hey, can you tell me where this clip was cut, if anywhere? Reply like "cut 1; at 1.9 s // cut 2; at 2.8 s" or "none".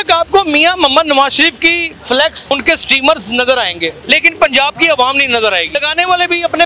cut 1; at 2.5 s // cut 2; at 3.9 s // cut 3; at 5.8 s